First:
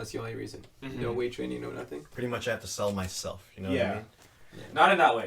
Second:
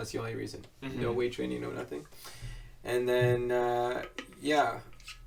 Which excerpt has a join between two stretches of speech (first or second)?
first